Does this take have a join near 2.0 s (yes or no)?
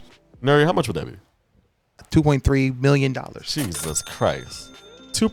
yes